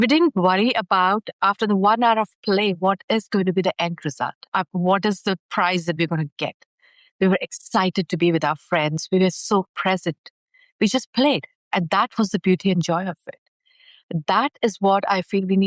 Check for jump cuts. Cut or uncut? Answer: uncut